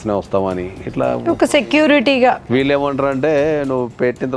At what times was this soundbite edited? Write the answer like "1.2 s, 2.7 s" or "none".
2.4 s